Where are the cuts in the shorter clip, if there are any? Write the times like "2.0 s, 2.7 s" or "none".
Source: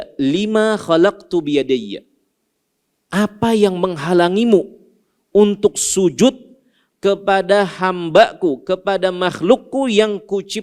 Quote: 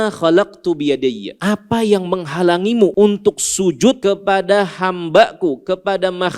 1.3 s, 2.9 s, 4.0 s